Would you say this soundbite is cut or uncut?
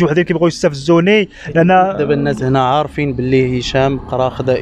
uncut